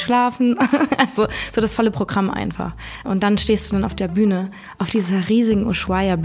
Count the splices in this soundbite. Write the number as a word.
one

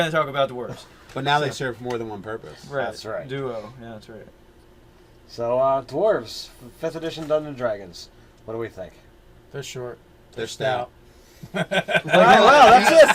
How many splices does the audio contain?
zero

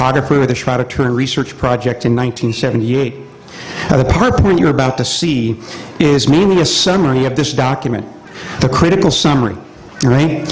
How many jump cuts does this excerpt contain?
one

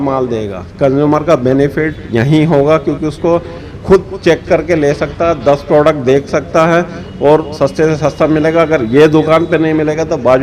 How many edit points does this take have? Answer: zero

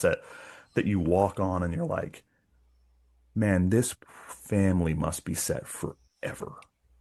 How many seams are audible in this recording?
zero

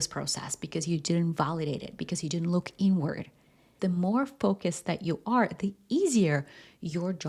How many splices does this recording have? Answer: one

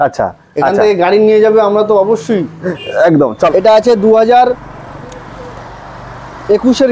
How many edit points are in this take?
one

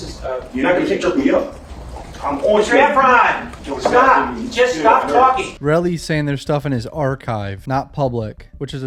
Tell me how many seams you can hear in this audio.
zero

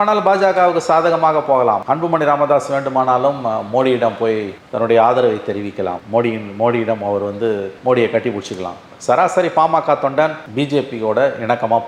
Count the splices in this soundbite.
zero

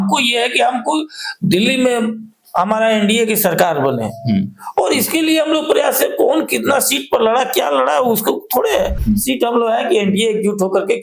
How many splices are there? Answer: one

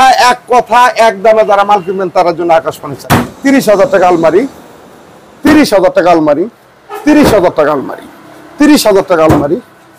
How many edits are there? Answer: one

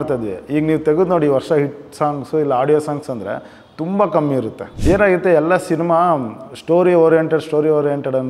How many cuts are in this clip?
one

